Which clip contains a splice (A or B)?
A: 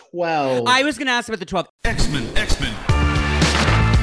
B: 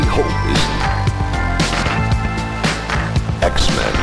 A